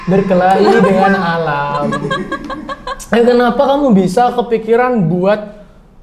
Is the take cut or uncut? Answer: uncut